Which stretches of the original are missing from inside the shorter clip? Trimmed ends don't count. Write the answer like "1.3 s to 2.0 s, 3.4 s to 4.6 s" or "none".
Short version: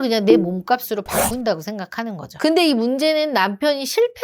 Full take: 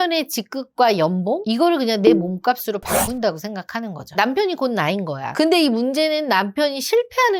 4.0 s to 5.2 s